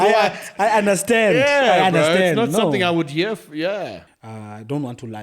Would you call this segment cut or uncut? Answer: cut